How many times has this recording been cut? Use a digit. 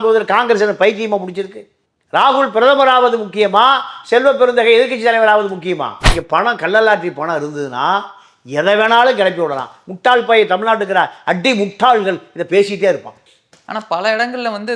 2